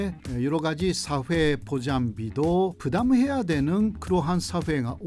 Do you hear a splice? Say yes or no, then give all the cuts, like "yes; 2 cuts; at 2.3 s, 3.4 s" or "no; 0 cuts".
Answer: no; 0 cuts